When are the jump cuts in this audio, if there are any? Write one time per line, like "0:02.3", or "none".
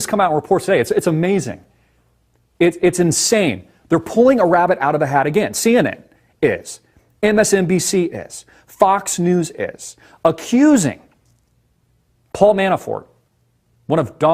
0:08.6